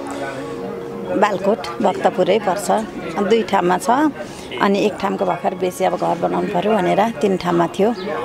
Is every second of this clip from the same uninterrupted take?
yes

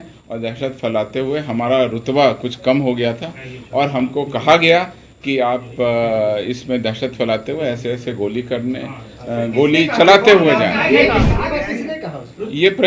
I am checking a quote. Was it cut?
yes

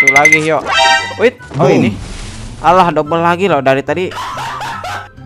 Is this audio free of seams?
yes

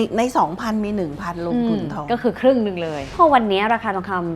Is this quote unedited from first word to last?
no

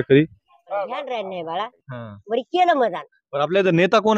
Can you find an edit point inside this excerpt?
yes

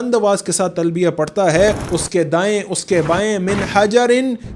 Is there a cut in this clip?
no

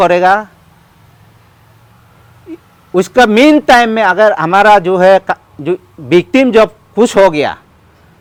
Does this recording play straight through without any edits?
yes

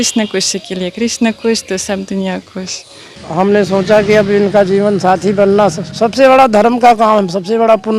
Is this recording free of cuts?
no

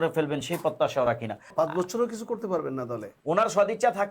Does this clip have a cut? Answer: yes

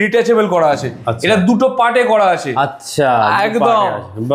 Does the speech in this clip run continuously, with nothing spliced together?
yes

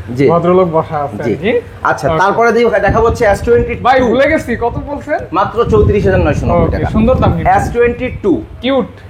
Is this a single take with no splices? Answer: yes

